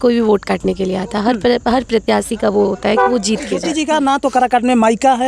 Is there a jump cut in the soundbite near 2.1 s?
no; 1 cut; at 3.7 s

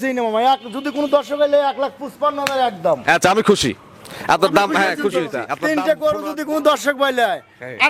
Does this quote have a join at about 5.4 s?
yes; 1 cut; at 5.4 s

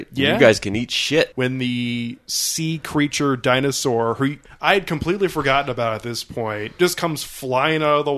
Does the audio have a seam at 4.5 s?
yes; 2 cuts; at 1.3 s, 4.5 s

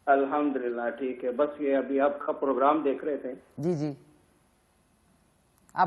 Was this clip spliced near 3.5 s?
no; 0 cuts

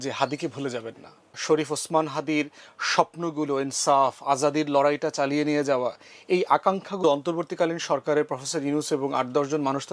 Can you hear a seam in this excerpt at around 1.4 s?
yes; 2 cuts; at 1.4 s, 7.0 s

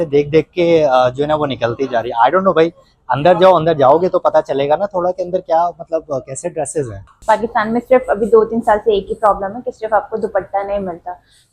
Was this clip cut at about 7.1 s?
yes; 1 cut; at 7.1 s

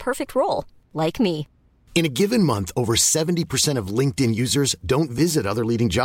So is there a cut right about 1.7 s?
no; 0 cuts

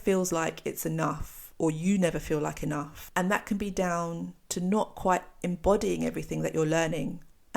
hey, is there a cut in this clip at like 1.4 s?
no; 1 cut; at 3.0 s

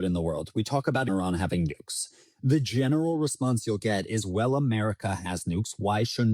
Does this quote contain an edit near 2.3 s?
no; 1 cut; at 1.1 s

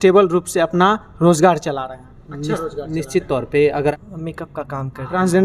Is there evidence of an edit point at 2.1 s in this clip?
no; 1 cut; at 3.9 s

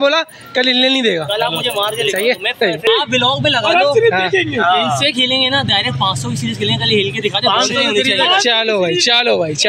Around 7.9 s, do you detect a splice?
no; 0 cuts

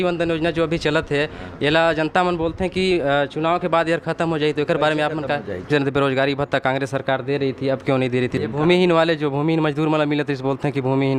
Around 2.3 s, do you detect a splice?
no; 2 cuts; at 5.7 s, 8.3 s

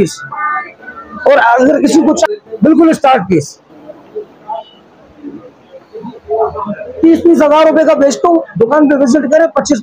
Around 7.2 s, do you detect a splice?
no; 1 cut; at 2.3 s

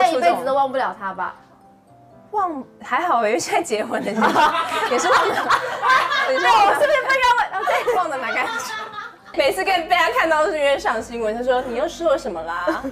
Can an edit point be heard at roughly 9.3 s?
yes; 1 cut; at 9.3 s

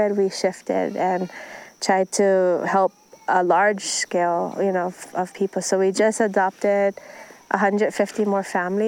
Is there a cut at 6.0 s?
no; 0 cuts

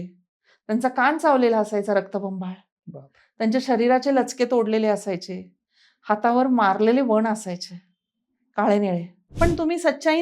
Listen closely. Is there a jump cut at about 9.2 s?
yes; 1 cut; at 9.2 s

